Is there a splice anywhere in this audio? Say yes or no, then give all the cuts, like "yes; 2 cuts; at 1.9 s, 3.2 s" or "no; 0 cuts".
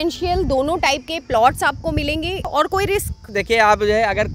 yes; 2 cuts; at 2.5 s, 3.2 s